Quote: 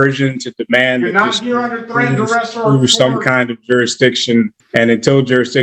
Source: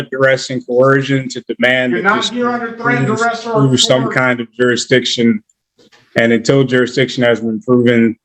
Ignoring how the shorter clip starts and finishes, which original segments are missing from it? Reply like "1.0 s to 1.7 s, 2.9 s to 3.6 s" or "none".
5.5 s to 6.0 s